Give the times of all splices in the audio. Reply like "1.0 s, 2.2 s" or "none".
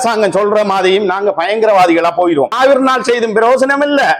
2.5 s